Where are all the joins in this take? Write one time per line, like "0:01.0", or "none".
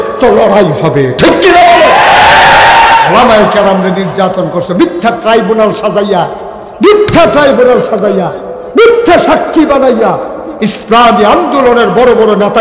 0:03.1